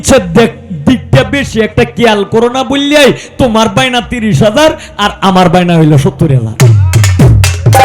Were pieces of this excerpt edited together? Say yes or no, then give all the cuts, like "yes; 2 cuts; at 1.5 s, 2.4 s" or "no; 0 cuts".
no; 0 cuts